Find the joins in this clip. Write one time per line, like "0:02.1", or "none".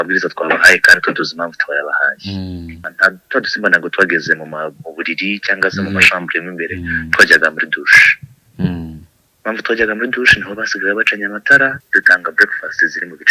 0:02.9
0:11.8